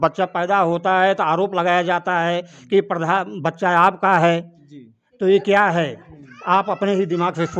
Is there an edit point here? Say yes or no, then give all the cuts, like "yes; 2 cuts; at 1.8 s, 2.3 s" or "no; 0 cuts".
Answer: no; 0 cuts